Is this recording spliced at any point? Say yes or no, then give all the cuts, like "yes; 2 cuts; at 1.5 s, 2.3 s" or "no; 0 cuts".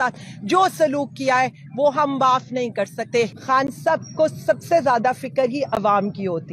yes; 1 cut; at 3.4 s